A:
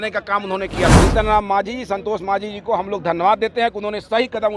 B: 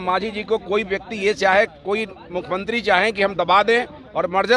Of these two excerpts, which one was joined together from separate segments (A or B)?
A